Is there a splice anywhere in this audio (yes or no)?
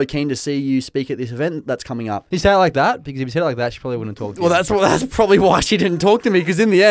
yes